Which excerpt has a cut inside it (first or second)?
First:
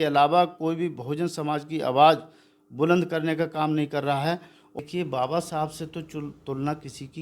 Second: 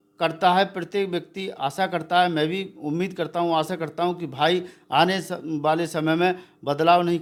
first